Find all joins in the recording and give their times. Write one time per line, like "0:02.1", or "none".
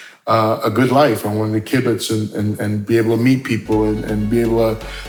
none